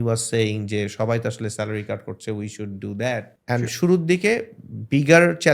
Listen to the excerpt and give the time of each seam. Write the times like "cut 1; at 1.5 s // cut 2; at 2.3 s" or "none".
cut 1; at 3.3 s